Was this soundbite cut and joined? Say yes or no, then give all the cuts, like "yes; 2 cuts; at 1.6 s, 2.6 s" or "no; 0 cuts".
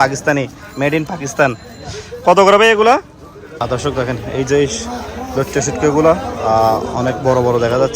yes; 1 cut; at 3.5 s